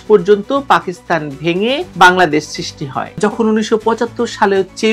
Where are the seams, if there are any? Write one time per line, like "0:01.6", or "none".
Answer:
0:03.0